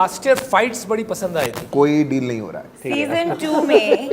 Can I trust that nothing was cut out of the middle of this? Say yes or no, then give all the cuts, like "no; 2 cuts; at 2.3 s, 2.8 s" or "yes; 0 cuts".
no; 2 cuts; at 1.6 s, 2.9 s